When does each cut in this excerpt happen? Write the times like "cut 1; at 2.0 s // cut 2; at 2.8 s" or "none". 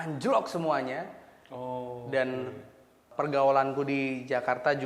cut 1; at 3.0 s